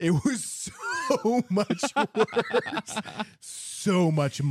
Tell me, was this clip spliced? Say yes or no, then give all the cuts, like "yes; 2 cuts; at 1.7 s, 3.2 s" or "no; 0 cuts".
no; 0 cuts